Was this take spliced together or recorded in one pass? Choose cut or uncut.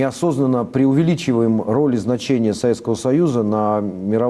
cut